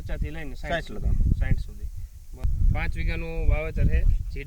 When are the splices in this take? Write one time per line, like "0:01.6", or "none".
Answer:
0:02.4